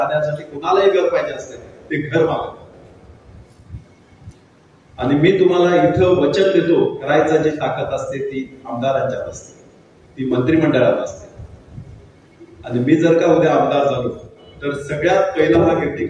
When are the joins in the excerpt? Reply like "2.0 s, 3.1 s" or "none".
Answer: 7.0 s